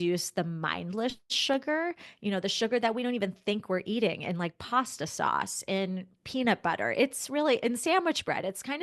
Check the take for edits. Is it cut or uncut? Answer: uncut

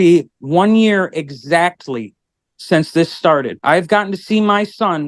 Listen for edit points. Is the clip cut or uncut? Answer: cut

